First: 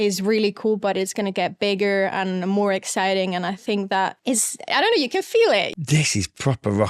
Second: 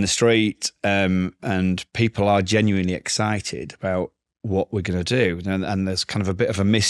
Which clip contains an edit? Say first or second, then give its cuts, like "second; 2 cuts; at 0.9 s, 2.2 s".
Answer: first; 2 cuts; at 4.2 s, 5.7 s